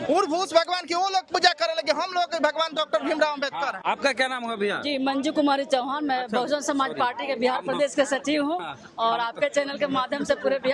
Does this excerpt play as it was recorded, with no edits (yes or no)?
yes